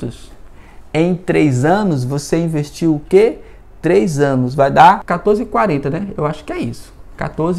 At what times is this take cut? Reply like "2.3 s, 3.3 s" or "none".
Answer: 5.1 s